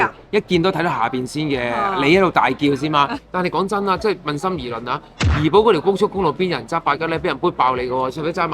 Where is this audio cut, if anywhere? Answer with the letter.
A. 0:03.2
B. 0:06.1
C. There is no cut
A